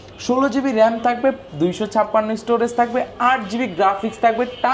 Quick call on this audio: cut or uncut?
uncut